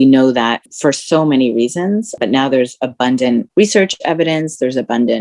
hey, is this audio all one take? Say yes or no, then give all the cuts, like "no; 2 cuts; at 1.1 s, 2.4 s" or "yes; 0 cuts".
no; 1 cut; at 3.5 s